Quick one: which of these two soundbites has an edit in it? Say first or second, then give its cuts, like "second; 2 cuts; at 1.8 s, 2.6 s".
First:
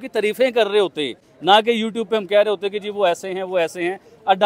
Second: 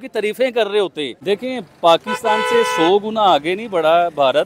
second; 1 cut; at 1.1 s